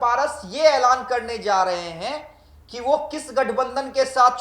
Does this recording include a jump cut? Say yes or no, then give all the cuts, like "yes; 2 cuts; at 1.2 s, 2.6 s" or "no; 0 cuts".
no; 0 cuts